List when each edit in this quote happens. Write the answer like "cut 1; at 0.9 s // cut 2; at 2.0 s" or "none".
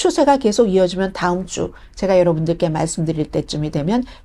none